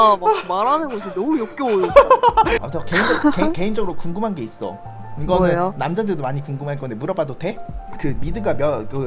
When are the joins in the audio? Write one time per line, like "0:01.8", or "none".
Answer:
0:02.7